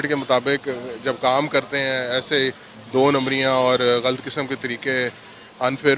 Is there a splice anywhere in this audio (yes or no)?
no